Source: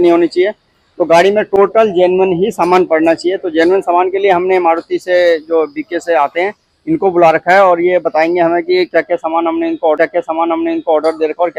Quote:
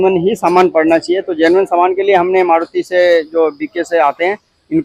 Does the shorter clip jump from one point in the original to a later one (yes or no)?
no